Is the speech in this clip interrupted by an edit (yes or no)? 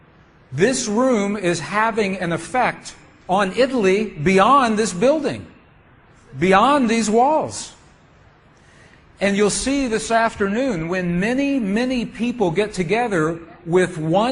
yes